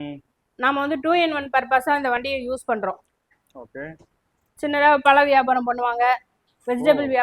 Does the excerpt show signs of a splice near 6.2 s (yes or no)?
no